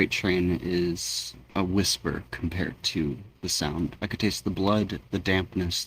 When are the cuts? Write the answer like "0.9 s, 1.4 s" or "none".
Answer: 4.0 s